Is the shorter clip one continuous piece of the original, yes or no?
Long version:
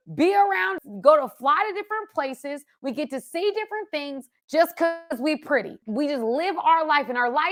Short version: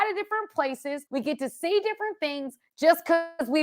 no